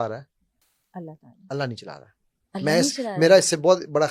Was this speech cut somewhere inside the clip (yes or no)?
no